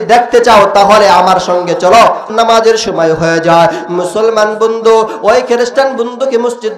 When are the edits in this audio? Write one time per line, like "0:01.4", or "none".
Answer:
0:02.3